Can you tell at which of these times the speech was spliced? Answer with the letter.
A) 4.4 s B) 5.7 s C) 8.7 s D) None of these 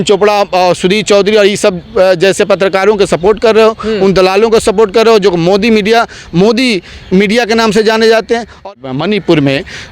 C